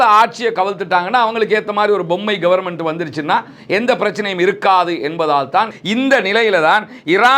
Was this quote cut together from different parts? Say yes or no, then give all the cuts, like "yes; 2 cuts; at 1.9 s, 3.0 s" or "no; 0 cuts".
yes; 1 cut; at 5.7 s